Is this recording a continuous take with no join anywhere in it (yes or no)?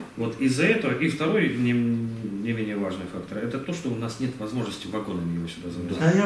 no